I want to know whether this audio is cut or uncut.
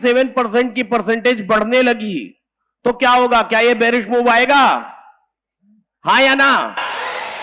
uncut